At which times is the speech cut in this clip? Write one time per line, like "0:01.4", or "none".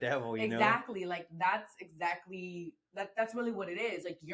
none